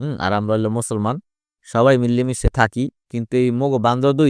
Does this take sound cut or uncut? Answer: uncut